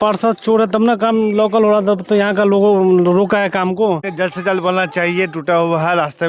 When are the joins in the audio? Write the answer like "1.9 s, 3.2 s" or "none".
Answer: 4.1 s